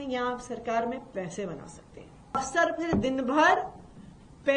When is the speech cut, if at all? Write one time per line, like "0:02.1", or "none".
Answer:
0:02.4